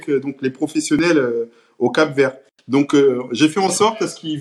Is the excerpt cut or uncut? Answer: uncut